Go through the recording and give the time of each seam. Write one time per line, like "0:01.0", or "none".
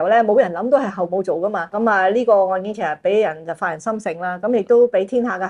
0:01.8